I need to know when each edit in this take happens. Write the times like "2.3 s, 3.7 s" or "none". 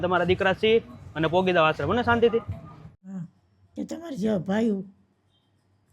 3.1 s